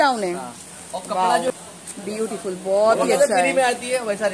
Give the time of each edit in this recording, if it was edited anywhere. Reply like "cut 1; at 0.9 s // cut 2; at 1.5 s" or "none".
cut 1; at 1.5 s